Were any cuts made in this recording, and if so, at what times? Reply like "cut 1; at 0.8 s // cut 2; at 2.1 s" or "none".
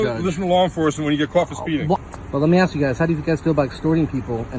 cut 1; at 2.0 s